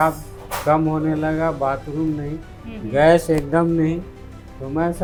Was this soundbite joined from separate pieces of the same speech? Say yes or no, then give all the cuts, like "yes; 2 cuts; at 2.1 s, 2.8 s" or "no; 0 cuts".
no; 0 cuts